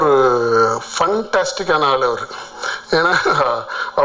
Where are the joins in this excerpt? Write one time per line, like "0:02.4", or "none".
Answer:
none

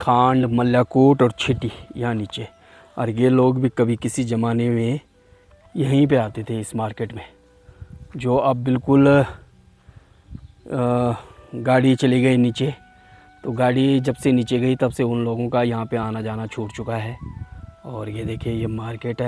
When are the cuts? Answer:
none

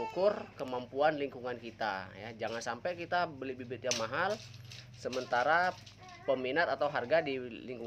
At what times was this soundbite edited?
none

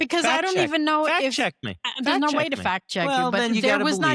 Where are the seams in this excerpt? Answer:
0:02.8

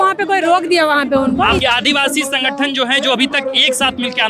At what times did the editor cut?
0:01.6

